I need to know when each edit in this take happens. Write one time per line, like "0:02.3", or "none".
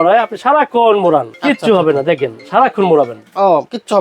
0:01.3